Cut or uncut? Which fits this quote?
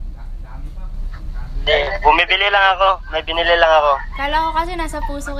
uncut